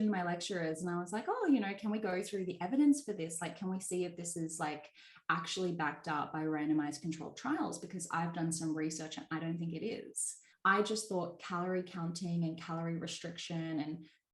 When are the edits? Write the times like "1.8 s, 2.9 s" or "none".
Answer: 10.4 s

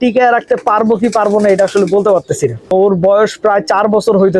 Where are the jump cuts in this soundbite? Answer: 2.7 s

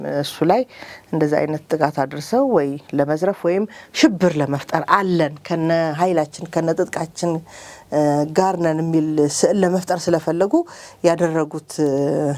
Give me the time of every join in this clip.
none

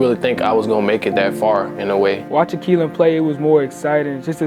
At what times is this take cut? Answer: 2.2 s

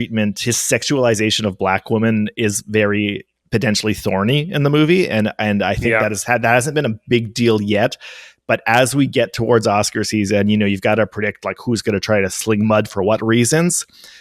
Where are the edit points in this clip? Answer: 3.3 s

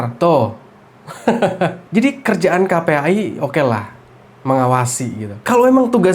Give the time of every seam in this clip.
1.8 s

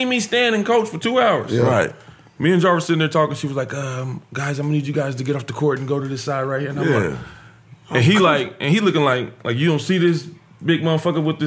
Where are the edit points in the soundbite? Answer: none

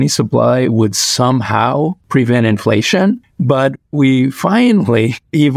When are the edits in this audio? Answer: 2.0 s, 3.2 s

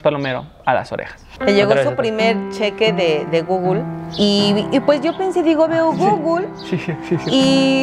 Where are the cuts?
1.2 s

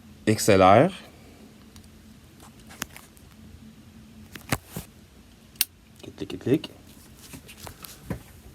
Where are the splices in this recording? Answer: 4.8 s

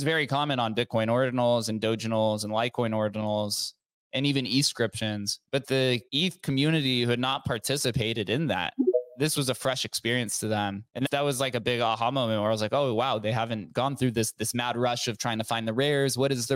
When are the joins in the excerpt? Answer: 5.8 s, 9.3 s, 11.0 s

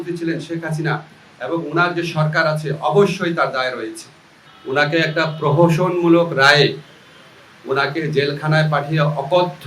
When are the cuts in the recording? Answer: 3.9 s

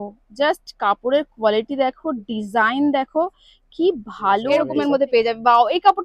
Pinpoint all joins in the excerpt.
4.7 s

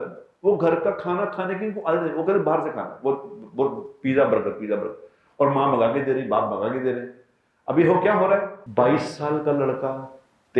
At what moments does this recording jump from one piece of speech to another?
8.6 s

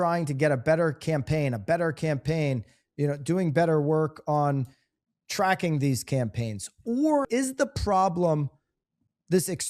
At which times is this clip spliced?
7.3 s

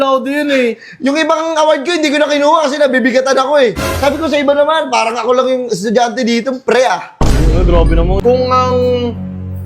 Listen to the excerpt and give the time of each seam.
8.2 s

